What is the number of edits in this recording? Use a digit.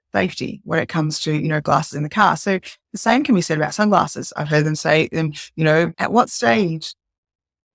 1